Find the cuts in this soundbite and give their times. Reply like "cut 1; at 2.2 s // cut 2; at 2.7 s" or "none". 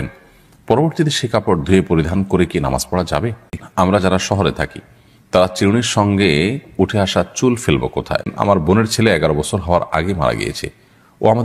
cut 1; at 3.6 s // cut 2; at 8.3 s